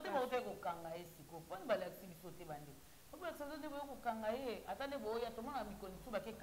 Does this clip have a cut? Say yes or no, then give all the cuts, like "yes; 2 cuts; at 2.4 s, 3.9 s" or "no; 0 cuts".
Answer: no; 0 cuts